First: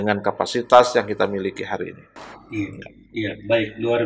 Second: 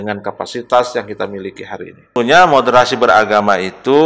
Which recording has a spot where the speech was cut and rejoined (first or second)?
second